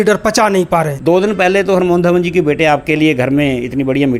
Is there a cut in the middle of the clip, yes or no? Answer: yes